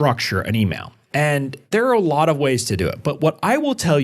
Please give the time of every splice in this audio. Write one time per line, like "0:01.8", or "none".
0:01.7